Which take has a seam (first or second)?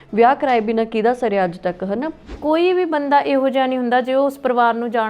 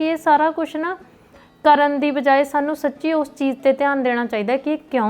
first